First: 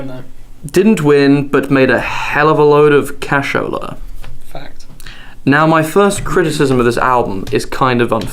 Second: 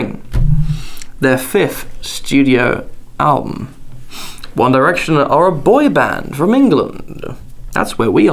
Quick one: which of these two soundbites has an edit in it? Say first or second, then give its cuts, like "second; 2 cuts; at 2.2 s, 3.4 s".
first; 1 cut; at 6.5 s